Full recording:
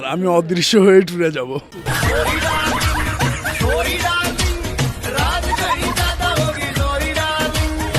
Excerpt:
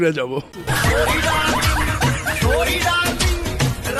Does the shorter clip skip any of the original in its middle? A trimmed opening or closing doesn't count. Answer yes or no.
no